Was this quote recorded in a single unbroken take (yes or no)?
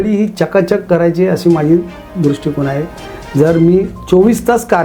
yes